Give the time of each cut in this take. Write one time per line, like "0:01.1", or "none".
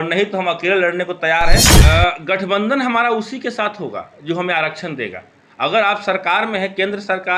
0:01.7